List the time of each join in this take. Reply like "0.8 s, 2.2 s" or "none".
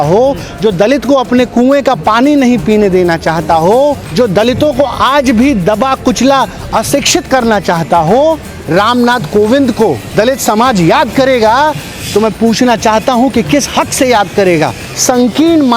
4.0 s, 8.5 s, 10.0 s, 14.9 s